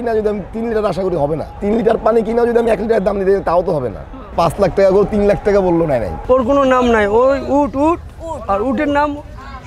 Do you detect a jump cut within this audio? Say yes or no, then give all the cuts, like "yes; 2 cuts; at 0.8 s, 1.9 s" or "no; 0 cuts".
yes; 3 cuts; at 1.5 s, 4.3 s, 6.1 s